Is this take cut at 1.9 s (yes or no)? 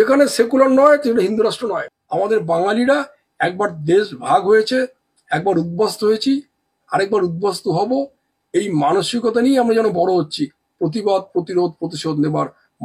yes